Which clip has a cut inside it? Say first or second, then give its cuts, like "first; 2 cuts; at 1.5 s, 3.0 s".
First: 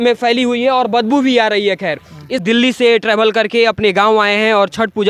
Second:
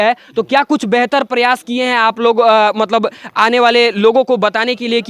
first; 1 cut; at 2.4 s